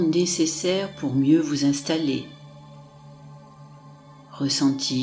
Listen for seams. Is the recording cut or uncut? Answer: uncut